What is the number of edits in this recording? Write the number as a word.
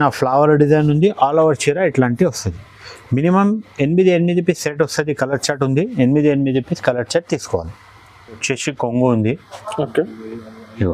one